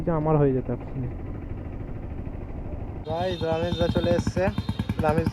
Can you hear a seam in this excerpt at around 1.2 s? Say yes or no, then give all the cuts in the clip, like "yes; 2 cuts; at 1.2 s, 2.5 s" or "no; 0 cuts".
no; 1 cut; at 3.0 s